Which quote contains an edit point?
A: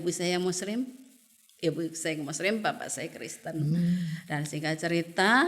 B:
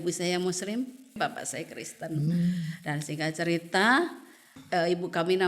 B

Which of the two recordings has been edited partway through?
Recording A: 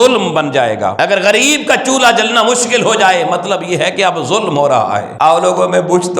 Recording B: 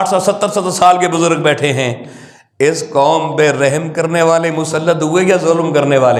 A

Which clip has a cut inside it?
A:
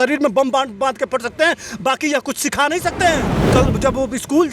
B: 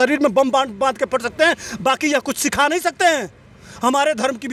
A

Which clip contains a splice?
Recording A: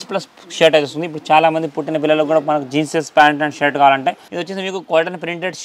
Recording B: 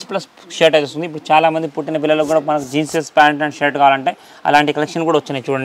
A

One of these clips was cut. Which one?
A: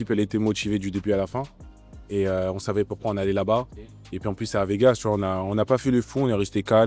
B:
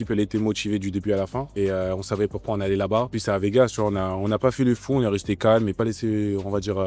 B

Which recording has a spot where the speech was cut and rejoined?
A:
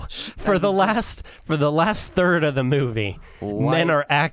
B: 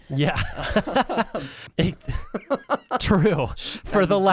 B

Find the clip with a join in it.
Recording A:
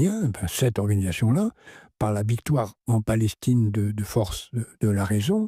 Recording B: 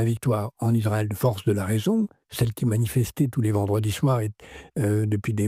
B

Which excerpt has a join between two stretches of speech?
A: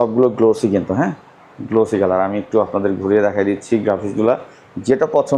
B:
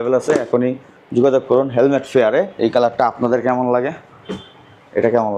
B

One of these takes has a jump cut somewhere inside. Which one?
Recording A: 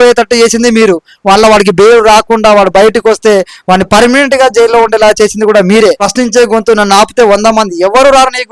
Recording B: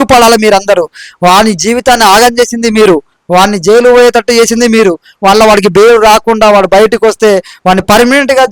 A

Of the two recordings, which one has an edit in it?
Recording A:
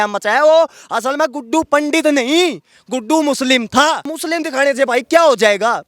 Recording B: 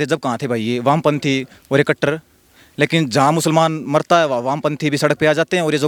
A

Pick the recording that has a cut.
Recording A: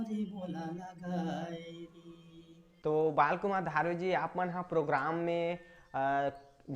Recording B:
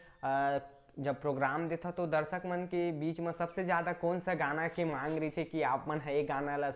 A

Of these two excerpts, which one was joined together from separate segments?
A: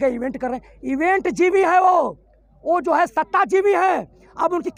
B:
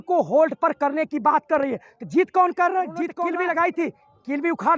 B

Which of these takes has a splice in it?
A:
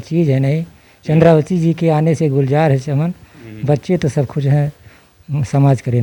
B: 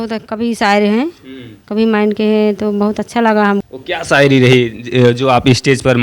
B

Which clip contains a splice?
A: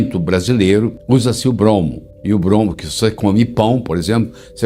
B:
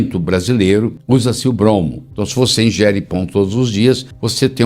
B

